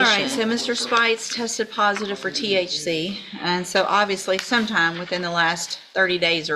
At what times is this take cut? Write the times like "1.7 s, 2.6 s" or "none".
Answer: none